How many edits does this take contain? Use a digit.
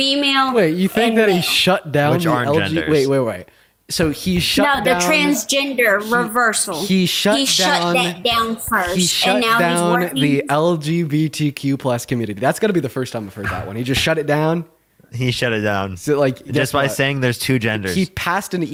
0